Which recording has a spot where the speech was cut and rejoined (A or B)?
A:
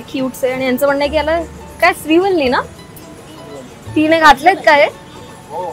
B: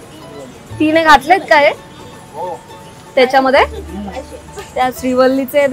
B